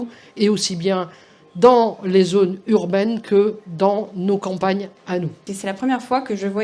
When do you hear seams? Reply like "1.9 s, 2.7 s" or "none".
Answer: 5.5 s